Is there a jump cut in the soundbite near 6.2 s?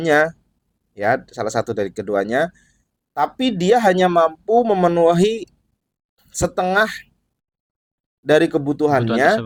no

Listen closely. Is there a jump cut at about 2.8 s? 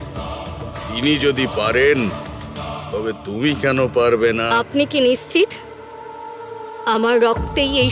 no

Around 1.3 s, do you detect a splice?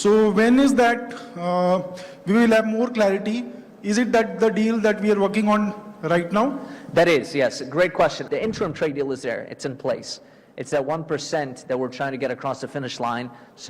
no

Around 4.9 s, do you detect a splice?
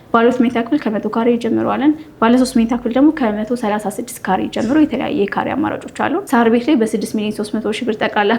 no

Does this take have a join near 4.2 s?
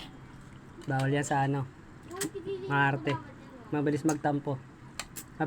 no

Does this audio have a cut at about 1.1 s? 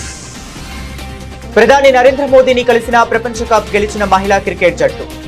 yes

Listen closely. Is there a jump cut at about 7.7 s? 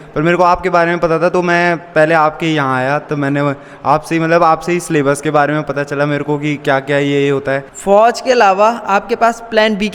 yes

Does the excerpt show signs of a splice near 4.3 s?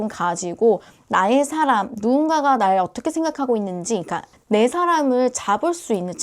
yes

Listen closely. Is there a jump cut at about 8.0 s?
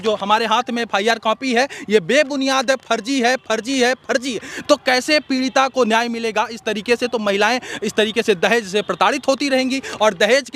no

